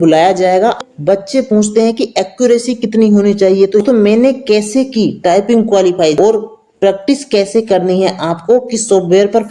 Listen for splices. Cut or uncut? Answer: cut